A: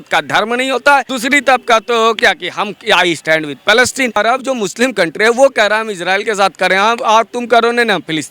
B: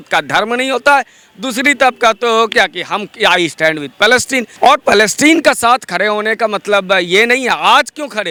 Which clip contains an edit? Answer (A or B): A